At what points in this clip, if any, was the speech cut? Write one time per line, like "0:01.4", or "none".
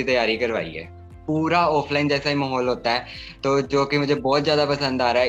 0:01.1